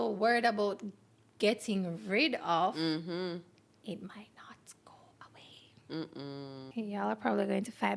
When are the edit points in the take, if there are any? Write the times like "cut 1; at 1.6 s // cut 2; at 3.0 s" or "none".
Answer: cut 1; at 6.7 s